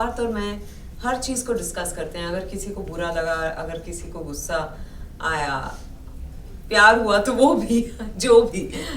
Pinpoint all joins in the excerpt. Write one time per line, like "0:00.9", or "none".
none